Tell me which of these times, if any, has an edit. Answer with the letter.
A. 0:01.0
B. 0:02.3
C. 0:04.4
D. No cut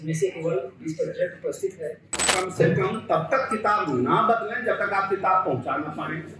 B